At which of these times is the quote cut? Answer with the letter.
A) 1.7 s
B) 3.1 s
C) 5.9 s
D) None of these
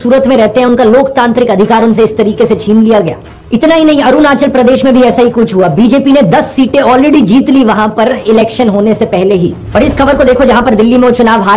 D